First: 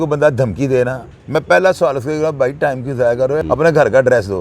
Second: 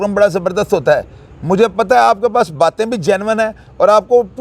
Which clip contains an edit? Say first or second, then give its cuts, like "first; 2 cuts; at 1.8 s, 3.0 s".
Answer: first; 2 cuts; at 1.1 s, 3.4 s